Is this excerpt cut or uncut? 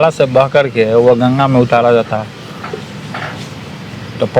uncut